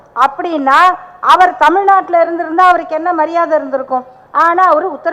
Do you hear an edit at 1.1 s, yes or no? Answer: no